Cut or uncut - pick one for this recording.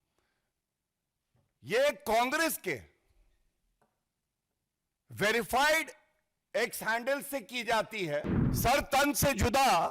cut